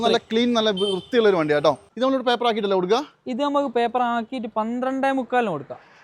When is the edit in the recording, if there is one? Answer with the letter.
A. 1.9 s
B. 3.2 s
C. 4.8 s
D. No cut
A